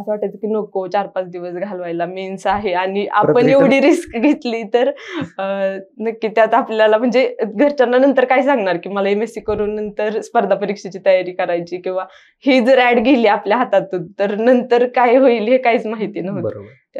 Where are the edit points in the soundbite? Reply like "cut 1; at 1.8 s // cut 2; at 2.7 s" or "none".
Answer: none